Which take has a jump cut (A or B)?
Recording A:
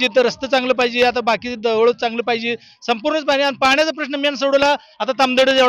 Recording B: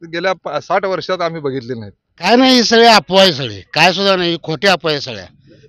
B